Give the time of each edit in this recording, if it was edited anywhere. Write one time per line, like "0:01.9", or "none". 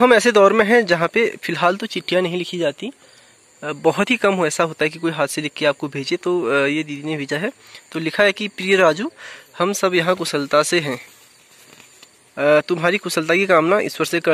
none